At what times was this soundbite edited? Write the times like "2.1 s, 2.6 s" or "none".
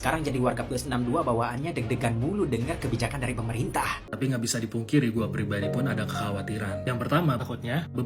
4.0 s